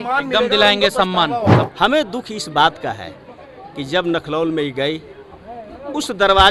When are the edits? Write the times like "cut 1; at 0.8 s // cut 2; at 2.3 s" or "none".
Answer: cut 1; at 1.7 s